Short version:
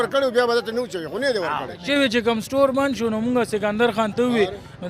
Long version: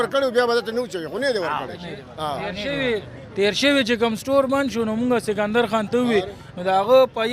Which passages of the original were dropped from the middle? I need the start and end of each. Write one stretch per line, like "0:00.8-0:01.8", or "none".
0:01.8-0:03.6